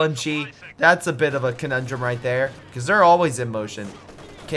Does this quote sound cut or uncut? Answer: uncut